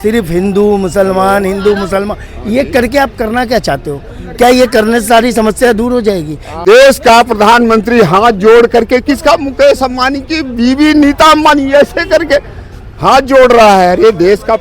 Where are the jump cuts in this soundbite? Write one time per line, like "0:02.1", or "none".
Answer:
0:06.6